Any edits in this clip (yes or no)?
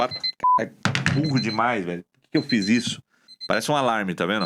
no